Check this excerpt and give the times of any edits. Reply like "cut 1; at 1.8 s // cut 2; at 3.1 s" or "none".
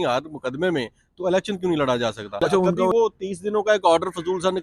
cut 1; at 2.9 s